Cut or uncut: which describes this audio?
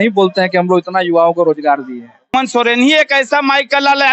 cut